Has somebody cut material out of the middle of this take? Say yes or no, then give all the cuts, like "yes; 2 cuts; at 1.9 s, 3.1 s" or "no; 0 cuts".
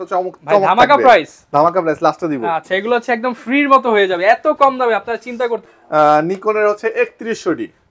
no; 0 cuts